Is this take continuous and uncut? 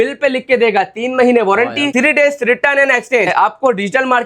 no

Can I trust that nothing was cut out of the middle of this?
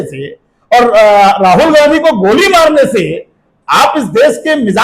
yes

